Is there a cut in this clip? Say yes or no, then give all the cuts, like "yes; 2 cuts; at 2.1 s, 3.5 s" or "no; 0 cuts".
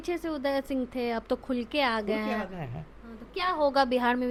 no; 0 cuts